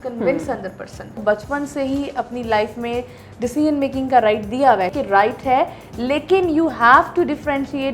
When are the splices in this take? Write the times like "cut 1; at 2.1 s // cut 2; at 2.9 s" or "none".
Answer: cut 1; at 1.1 s // cut 2; at 4.9 s